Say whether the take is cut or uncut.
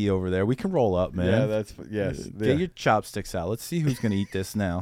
uncut